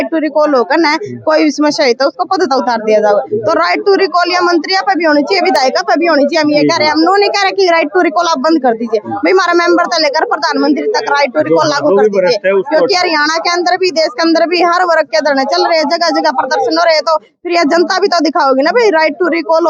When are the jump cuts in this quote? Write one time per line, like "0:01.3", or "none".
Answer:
none